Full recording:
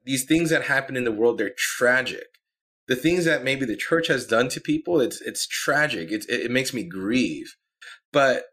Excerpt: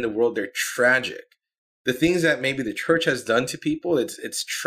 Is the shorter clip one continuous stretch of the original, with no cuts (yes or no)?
yes